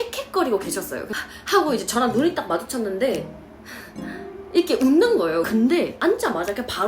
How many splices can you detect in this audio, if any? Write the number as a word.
two